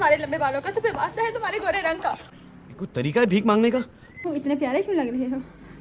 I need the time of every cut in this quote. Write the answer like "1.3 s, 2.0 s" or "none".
4.3 s